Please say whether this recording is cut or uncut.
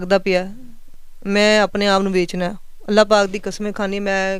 uncut